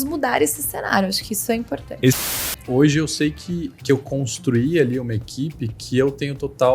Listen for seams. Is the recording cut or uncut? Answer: cut